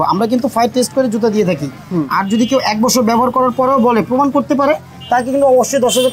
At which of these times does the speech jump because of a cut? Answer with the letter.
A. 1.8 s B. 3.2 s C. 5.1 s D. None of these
D